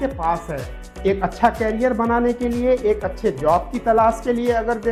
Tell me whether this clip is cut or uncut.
uncut